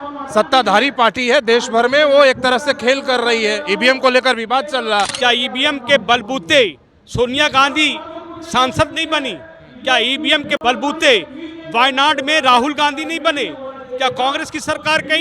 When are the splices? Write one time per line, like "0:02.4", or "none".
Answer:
0:05.1
0:10.6